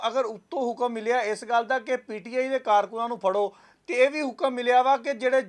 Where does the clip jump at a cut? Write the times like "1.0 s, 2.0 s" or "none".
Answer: none